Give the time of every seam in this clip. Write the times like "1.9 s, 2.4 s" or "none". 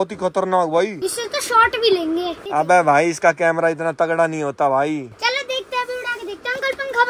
none